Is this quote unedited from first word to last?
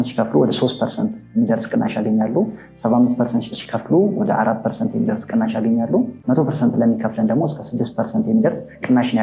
no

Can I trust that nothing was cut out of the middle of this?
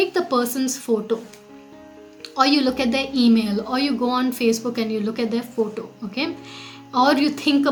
yes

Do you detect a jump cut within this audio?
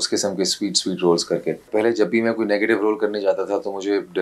yes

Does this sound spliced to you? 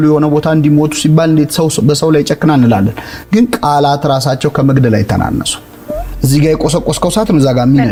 no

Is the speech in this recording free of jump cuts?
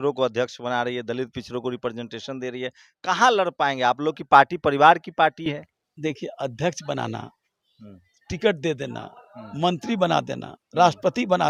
yes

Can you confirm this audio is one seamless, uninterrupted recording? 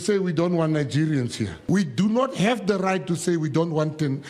no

